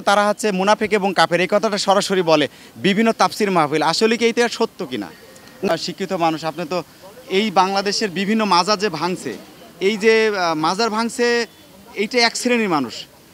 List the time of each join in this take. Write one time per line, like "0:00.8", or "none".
0:05.7